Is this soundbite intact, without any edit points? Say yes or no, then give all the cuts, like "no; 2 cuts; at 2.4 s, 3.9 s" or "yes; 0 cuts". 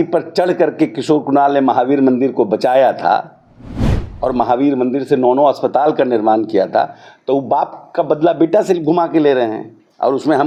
yes; 0 cuts